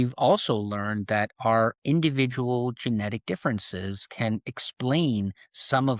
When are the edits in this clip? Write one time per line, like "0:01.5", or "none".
none